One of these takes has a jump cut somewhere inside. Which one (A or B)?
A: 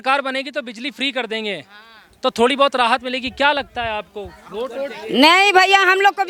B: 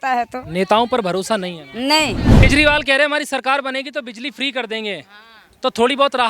B